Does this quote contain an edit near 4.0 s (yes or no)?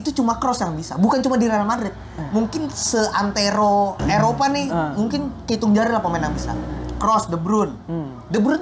yes